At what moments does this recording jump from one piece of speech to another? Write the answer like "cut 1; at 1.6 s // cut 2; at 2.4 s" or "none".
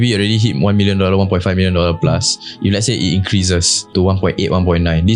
cut 1; at 3.8 s